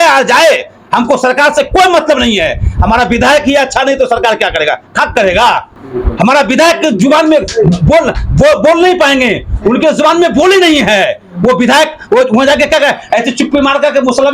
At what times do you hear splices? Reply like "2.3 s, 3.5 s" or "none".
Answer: none